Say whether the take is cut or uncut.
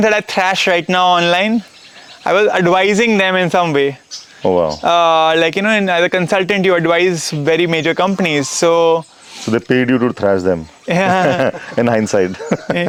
uncut